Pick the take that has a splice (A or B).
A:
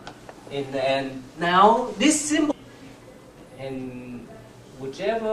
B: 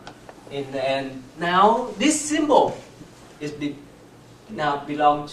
B